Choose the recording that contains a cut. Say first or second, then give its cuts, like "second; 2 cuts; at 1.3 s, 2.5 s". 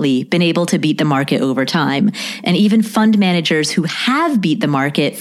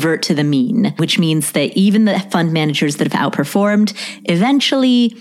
second; 1 cut; at 1.0 s